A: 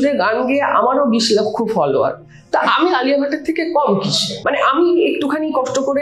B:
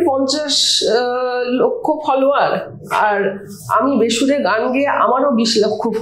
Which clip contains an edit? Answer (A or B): A